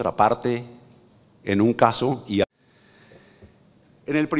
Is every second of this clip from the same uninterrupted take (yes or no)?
yes